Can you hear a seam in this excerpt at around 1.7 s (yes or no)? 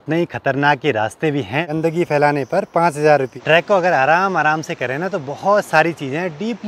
yes